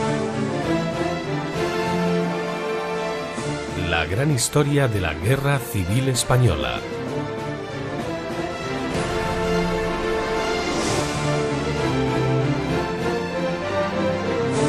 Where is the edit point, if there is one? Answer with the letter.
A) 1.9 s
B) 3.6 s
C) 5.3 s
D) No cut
D